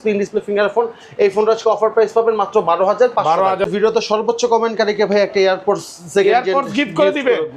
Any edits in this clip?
yes; 1 cut; at 3.7 s

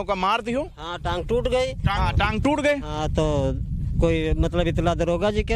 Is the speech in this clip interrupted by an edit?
yes; 1 cut; at 1.9 s

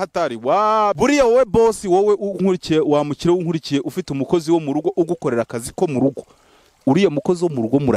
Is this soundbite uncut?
no; 1 cut; at 1.0 s

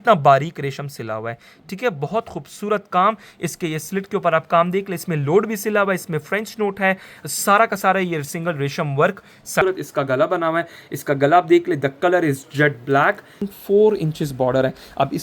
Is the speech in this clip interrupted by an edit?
yes; 2 cuts; at 9.6 s, 13.5 s

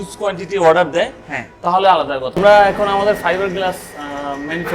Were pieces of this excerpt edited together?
yes; 1 cut; at 2.2 s

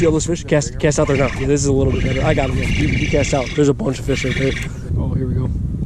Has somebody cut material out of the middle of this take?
yes; 1 cut; at 4.9 s

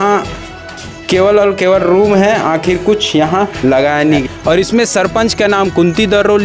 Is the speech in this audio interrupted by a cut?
yes; 1 cut; at 4.2 s

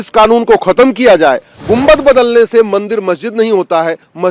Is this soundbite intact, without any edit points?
no; 1 cut; at 1.5 s

